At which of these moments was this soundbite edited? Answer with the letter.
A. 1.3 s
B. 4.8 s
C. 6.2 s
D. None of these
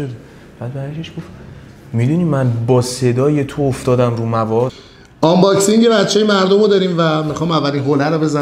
B